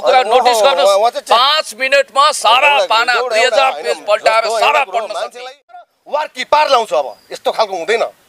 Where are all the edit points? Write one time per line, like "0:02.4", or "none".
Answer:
0:06.0